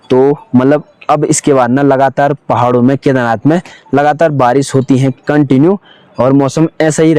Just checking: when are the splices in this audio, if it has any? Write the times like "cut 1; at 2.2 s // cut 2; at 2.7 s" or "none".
none